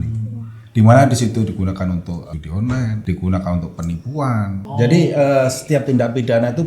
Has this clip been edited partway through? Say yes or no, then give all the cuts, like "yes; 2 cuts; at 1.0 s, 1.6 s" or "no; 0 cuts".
yes; 2 cuts; at 2.5 s, 4.7 s